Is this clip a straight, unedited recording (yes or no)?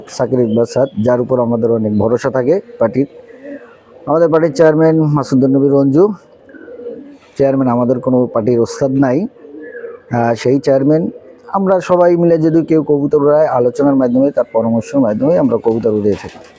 yes